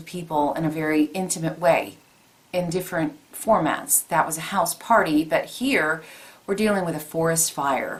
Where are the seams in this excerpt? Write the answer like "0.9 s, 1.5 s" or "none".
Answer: none